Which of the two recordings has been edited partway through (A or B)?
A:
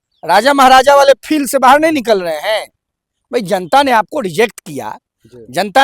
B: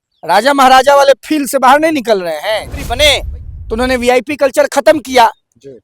B